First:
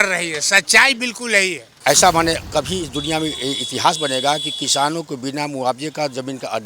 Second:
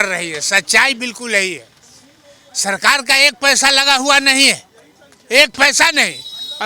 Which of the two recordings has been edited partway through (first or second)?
first